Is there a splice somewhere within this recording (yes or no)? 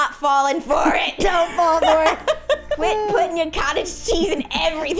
yes